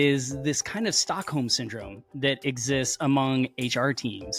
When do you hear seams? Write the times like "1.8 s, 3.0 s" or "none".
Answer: none